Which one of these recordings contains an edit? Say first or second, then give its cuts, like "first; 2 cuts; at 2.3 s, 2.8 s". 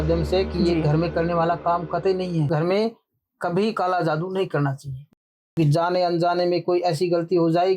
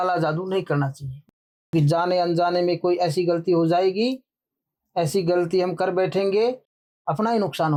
first; 1 cut; at 2.5 s